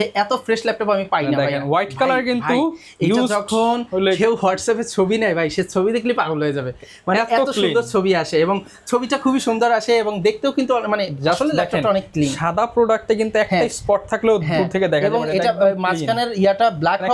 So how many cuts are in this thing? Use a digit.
0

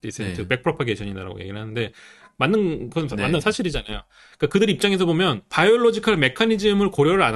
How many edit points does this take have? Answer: 1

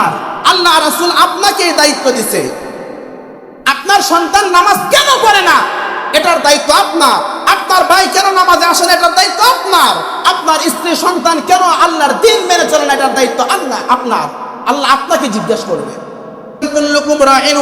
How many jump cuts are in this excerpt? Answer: 1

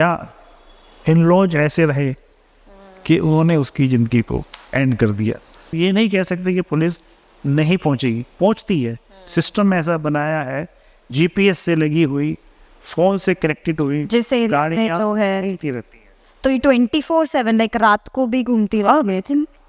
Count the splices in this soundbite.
1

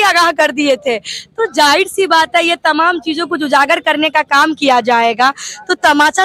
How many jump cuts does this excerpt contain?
0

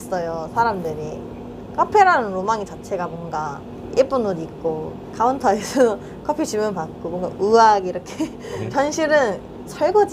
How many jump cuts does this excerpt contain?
2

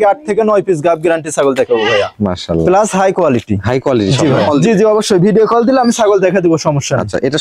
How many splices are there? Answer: 1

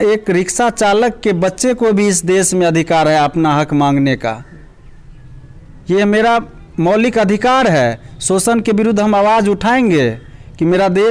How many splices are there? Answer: 0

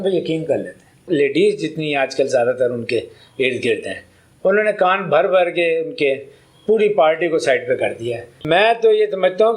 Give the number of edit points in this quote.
2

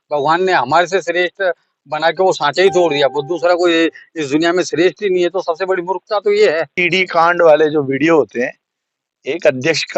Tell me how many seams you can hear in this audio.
1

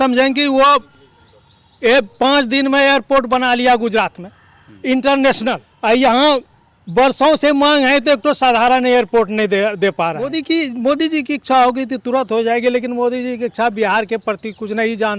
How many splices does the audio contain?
2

